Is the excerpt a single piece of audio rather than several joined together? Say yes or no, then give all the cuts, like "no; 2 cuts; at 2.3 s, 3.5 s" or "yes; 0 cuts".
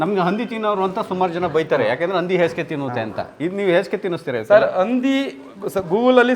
yes; 0 cuts